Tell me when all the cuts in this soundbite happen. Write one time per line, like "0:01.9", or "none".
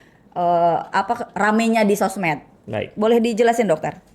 none